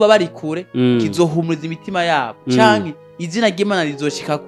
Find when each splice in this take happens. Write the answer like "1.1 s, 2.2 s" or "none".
none